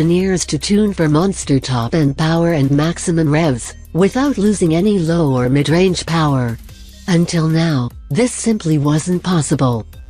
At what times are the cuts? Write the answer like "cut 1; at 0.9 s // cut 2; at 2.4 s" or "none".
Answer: cut 1; at 4.1 s